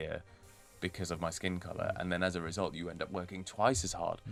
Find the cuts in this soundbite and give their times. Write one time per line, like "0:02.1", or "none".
none